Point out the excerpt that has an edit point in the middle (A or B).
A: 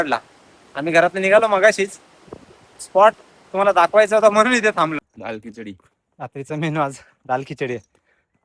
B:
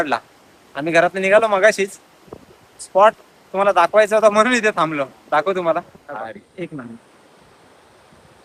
A